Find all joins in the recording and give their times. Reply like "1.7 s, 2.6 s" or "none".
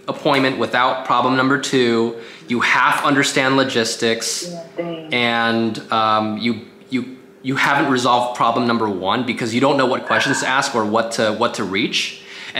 none